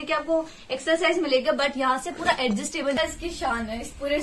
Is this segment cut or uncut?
cut